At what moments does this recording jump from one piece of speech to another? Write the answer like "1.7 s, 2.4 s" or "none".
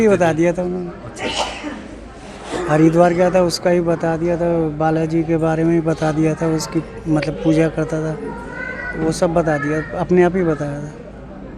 none